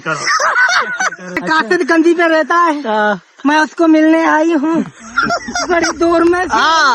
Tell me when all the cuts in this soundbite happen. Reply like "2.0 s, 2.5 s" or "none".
1.4 s